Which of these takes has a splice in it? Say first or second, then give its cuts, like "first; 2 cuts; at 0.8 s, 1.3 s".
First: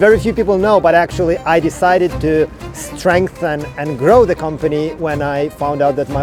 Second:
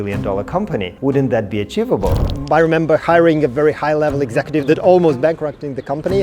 second; 2 cuts; at 0.9 s, 2.3 s